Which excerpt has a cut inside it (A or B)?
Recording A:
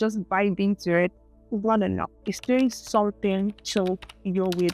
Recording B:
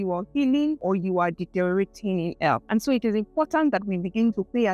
B